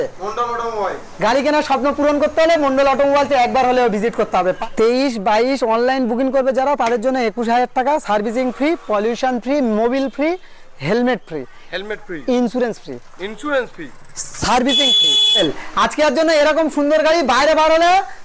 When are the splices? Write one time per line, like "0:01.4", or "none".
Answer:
0:04.6
0:15.4